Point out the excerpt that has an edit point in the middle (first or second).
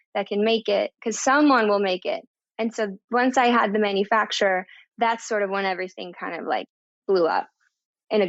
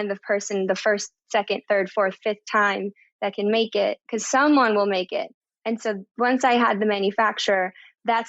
second